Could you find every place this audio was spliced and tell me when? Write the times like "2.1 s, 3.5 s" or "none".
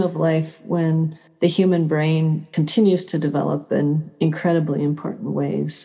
1.2 s, 2.5 s